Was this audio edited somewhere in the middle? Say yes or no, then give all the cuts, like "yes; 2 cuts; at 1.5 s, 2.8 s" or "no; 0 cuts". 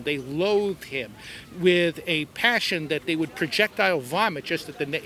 no; 0 cuts